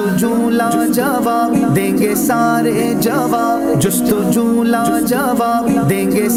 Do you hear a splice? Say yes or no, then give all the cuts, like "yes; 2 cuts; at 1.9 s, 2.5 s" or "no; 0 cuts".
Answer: no; 0 cuts